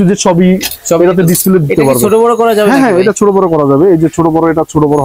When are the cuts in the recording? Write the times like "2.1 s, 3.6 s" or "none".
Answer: none

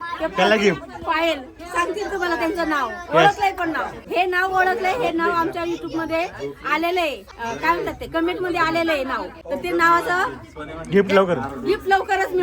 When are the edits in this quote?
3.9 s, 7.3 s, 9.3 s

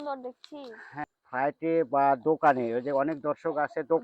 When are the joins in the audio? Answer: 1.0 s

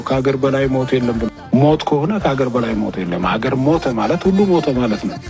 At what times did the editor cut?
1.3 s

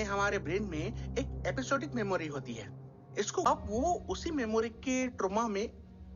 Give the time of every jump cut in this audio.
3.4 s

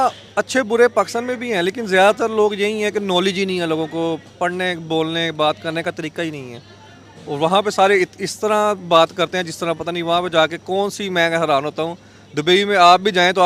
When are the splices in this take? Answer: none

